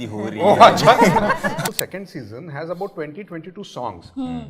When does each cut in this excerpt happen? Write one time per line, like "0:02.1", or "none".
0:01.6